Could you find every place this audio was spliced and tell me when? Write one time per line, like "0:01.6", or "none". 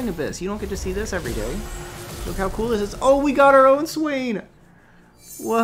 none